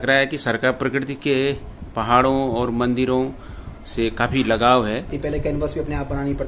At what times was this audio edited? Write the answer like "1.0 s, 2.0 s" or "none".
5.1 s